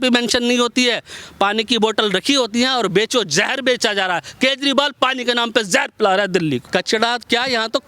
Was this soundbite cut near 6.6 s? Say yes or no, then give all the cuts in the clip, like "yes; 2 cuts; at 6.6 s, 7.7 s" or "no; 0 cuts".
yes; 1 cut; at 6.6 s